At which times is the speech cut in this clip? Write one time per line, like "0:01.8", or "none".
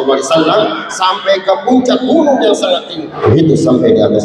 0:03.1